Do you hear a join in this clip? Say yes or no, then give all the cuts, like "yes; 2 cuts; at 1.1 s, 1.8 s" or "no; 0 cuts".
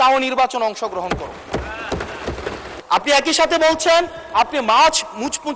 yes; 1 cut; at 2.7 s